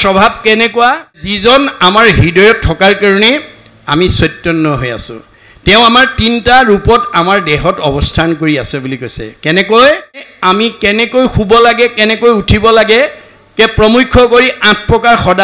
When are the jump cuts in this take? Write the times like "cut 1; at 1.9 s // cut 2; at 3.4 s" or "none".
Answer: cut 1; at 1.3 s // cut 2; at 10.3 s